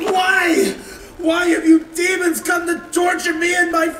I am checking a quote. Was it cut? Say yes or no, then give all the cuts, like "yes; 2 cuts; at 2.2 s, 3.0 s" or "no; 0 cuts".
no; 0 cuts